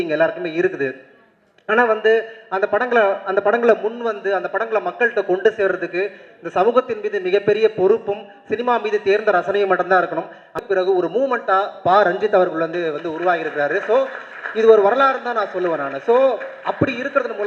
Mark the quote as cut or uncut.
cut